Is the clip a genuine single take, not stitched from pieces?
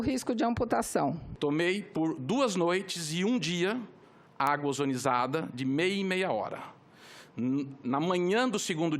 no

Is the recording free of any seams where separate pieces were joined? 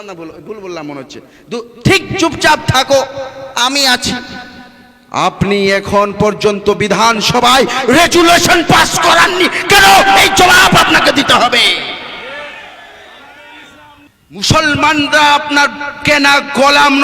no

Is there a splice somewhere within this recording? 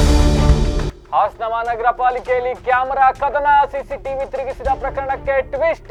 no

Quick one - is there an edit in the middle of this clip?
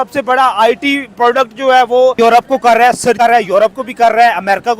yes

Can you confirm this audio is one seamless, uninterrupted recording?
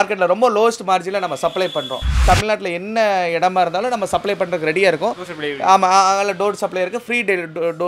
no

